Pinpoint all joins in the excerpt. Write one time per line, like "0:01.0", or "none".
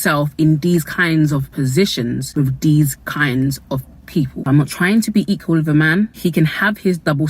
0:01.5
0:04.4